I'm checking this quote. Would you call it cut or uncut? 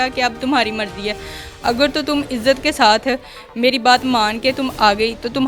uncut